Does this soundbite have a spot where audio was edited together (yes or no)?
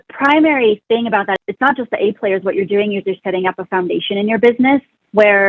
yes